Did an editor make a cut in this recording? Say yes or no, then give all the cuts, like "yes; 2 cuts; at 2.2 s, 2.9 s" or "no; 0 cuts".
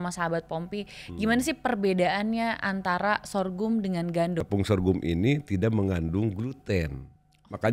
yes; 1 cut; at 4.4 s